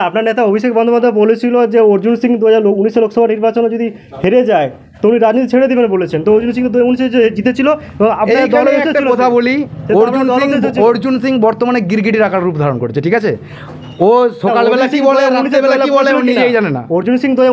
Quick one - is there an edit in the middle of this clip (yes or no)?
no